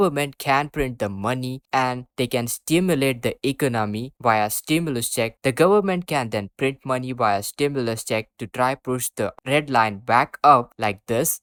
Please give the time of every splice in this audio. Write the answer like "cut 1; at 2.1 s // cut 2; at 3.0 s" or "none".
none